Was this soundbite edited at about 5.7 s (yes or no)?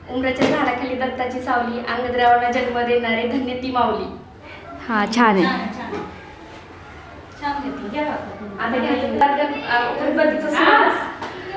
no